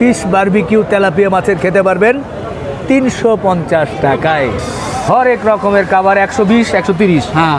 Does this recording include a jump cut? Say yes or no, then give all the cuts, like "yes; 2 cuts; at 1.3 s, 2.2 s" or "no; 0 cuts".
yes; 1 cut; at 4.7 s